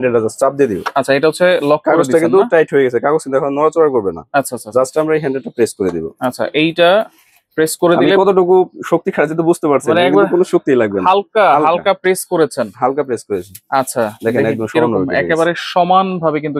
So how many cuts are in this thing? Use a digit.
0